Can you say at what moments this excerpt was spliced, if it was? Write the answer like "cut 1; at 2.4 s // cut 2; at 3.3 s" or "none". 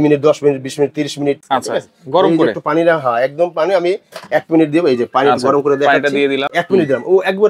cut 1; at 1.4 s // cut 2; at 6.5 s